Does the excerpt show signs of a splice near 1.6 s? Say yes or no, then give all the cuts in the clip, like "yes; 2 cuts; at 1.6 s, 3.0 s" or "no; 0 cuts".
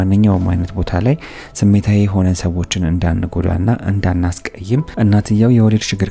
no; 1 cut; at 4.9 s